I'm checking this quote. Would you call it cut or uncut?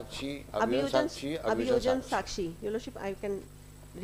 uncut